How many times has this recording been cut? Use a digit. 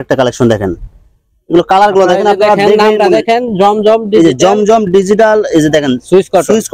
0